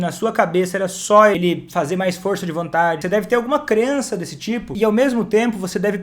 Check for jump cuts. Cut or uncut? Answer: cut